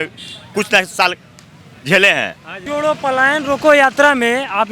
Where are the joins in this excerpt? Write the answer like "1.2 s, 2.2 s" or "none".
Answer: 2.6 s